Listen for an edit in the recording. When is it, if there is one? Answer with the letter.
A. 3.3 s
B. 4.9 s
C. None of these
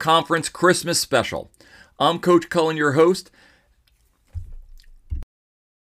C